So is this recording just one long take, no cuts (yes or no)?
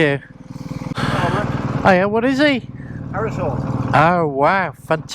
no